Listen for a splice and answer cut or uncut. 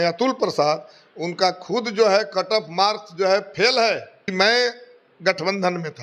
cut